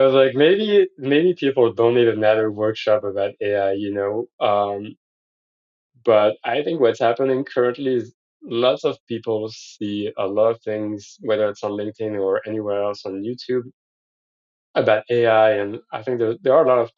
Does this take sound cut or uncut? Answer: uncut